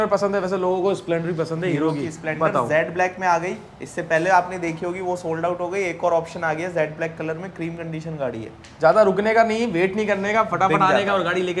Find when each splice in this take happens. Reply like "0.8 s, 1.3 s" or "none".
none